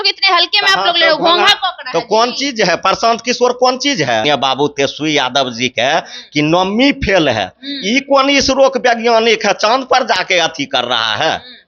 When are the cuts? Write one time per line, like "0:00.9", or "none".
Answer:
0:04.2